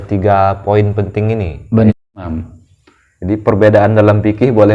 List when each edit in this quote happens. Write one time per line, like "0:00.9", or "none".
0:02.2